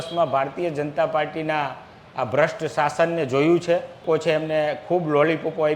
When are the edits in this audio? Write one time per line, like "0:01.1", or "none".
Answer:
0:04.0

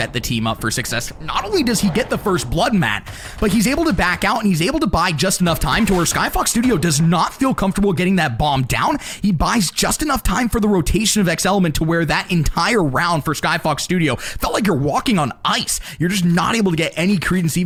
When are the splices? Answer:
none

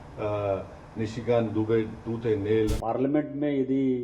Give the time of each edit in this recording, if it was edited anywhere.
0:02.8

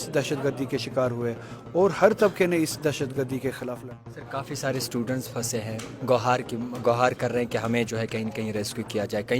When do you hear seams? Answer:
0:03.8

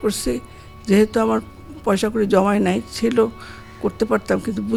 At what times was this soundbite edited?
none

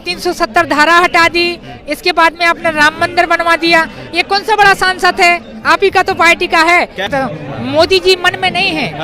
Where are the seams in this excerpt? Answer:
0:07.1

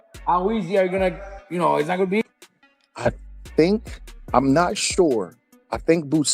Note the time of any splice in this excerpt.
0:02.2

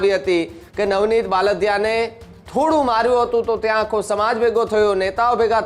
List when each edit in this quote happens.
none

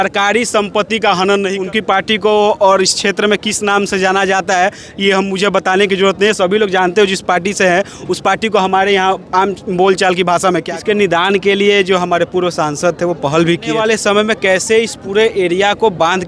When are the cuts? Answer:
0:01.5
0:10.7
0:13.7

